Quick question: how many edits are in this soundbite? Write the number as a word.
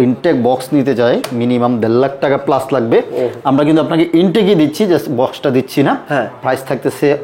zero